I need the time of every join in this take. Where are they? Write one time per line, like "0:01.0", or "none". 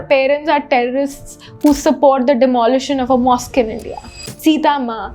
0:04.0